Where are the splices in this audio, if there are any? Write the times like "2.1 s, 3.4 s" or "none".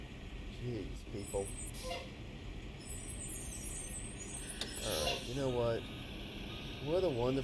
none